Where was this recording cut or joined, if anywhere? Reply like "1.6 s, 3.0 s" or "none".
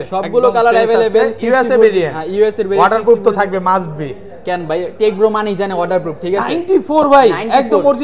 none